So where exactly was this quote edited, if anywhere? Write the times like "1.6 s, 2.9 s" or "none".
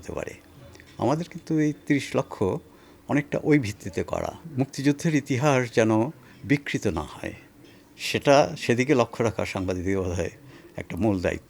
4.4 s